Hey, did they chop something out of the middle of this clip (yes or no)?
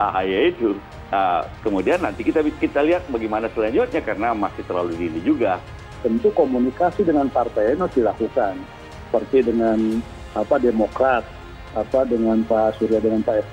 yes